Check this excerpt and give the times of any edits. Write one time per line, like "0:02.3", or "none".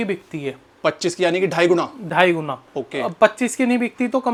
none